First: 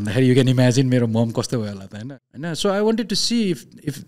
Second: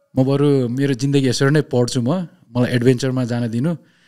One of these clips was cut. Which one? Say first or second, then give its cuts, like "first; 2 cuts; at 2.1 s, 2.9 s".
first; 1 cut; at 2.0 s